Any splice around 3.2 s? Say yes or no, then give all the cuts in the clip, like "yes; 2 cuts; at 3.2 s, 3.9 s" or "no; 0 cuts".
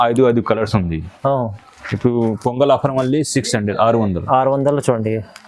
no; 1 cut; at 1.1 s